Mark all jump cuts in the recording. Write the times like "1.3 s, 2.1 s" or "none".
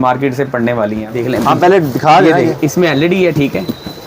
1.1 s

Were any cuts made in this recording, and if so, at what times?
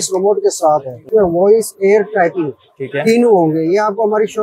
1.0 s

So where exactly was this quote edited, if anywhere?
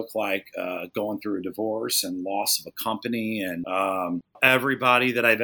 3.6 s, 4.4 s

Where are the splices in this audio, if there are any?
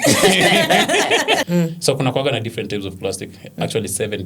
1.4 s

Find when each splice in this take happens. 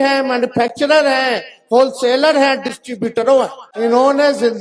3.6 s

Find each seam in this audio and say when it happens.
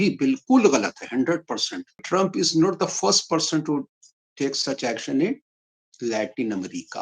2.0 s

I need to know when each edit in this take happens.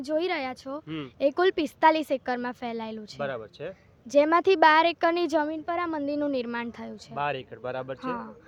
none

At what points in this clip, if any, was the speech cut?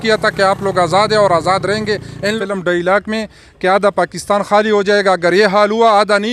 2.4 s

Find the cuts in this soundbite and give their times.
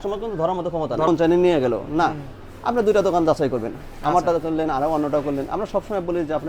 1.1 s

